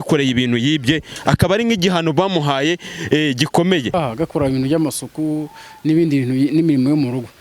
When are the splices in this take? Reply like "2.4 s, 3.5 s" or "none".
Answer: 3.9 s